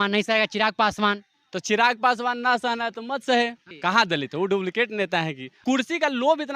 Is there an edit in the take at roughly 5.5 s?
yes; 2 cuts; at 3.7 s, 5.5 s

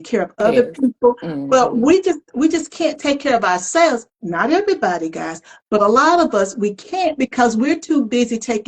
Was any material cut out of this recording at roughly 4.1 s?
no; 0 cuts

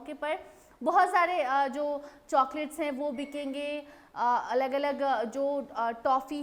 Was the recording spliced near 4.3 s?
no; 0 cuts

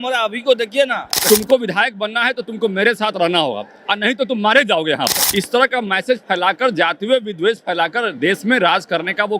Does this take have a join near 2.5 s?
no; 2 cuts; at 1.1 s, 5.2 s

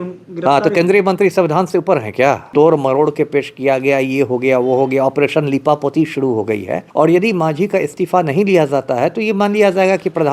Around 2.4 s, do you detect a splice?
yes; 2 cuts; at 2.4 s, 6.8 s

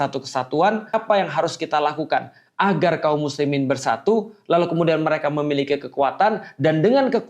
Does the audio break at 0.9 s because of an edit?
yes; 1 cut; at 0.9 s

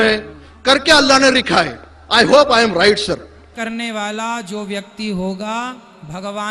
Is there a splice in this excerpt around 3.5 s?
yes; 1 cut; at 3.5 s

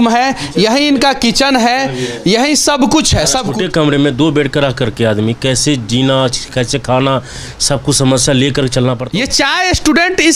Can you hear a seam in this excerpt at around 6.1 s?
no; 2 cuts; at 3.5 s, 9.0 s

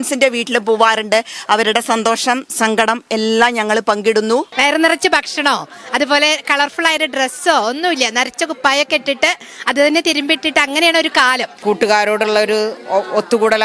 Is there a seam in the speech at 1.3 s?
no; 2 cuts; at 4.5 s, 11.5 s

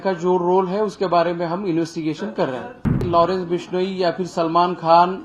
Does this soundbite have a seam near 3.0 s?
yes; 1 cut; at 3.0 s

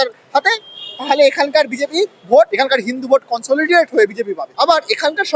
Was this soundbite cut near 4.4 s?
yes; 2 cuts; at 2.5 s, 4.4 s

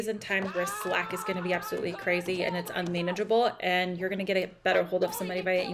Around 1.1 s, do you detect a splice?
no; 0 cuts

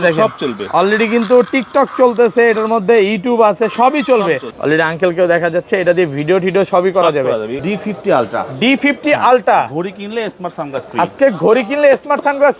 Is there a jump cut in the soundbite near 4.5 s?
yes; 2 cuts; at 4.5 s, 7.6 s

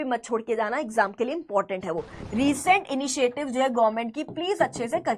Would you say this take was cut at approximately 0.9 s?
no; 1 cut; at 2.1 s

